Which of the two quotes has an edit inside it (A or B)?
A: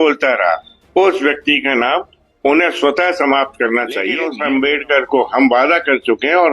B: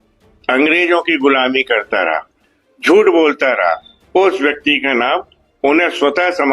A